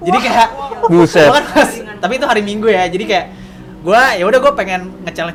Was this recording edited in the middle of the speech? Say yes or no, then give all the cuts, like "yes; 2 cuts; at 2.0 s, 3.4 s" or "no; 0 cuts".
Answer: no; 0 cuts